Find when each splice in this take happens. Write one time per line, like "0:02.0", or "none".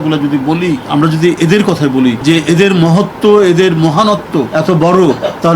0:00.8
0:02.2
0:04.5